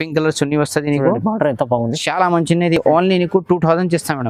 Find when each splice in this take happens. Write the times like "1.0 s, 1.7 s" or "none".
none

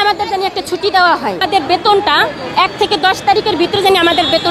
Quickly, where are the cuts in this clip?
1.4 s

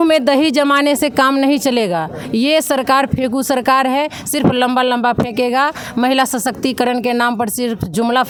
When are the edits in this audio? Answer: none

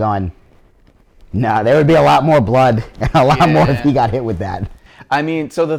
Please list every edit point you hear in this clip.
none

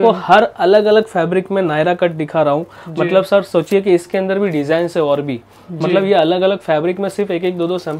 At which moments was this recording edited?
none

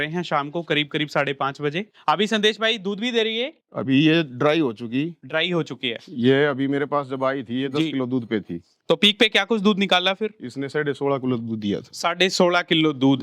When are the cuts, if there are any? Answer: 1.9 s

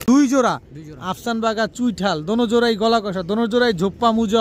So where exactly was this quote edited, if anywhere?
none

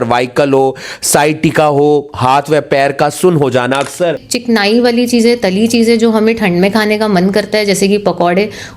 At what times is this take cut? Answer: 4.3 s

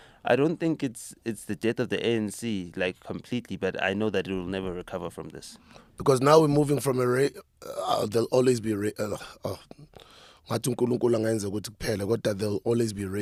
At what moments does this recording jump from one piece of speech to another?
none

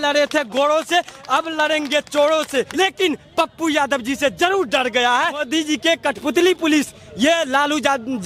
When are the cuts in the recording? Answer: 2.7 s, 5.5 s

